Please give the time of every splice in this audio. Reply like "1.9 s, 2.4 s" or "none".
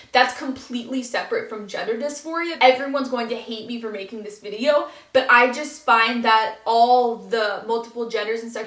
2.5 s